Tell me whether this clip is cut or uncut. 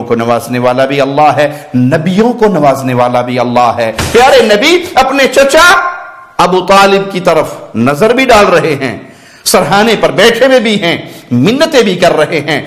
cut